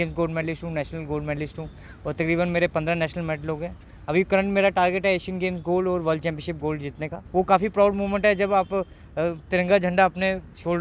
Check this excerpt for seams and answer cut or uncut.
cut